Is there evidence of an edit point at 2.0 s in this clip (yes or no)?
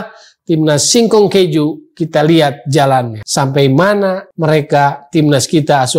no